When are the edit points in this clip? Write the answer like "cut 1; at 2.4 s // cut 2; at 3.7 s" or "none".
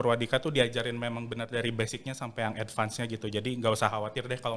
none